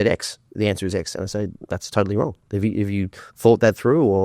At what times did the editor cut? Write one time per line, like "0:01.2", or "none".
none